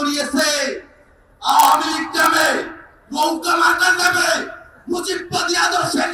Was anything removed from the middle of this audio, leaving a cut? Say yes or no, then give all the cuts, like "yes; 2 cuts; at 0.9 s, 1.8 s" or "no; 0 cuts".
no; 0 cuts